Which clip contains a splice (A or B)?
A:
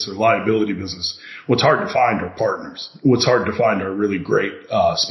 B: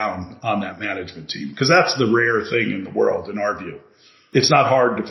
B